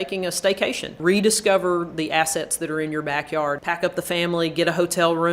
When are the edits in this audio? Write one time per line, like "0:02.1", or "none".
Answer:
0:01.0
0:03.6